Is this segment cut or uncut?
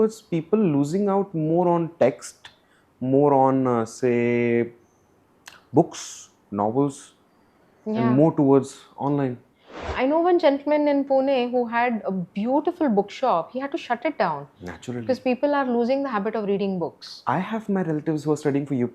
uncut